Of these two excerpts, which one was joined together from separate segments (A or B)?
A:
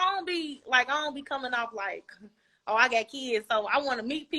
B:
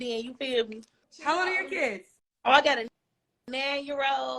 B